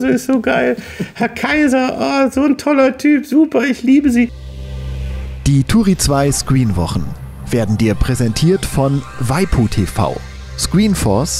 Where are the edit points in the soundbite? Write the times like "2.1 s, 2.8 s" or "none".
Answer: 4.5 s